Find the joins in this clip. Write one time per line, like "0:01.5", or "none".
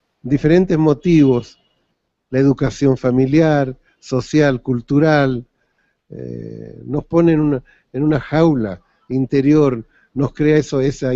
none